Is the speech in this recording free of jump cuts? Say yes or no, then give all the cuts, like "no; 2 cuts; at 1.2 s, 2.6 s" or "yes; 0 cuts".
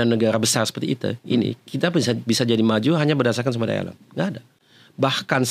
yes; 0 cuts